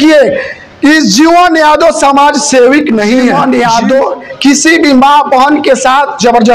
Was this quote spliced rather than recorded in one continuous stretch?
yes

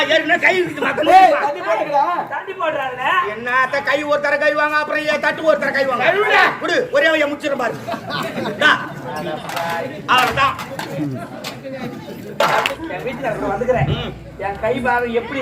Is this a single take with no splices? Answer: no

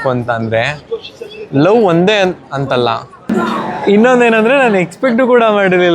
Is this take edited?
yes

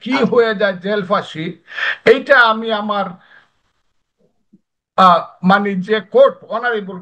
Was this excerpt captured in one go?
yes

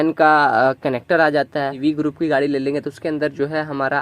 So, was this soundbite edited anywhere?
yes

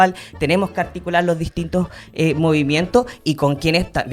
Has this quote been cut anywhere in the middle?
no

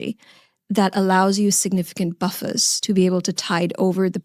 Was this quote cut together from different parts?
no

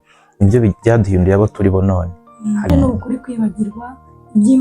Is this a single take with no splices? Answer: no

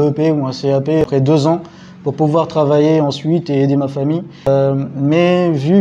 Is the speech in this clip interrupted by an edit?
yes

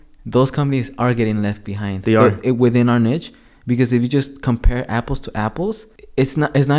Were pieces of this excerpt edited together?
no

